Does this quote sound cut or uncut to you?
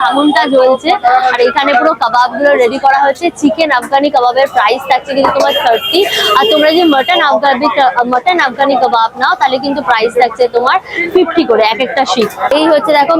uncut